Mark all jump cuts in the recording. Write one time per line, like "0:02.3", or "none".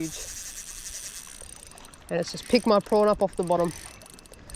none